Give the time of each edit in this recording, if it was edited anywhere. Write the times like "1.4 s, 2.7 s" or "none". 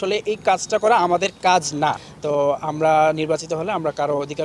2.0 s